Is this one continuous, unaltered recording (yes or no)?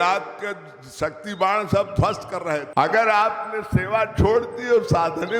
no